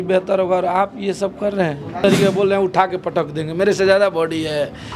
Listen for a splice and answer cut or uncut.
cut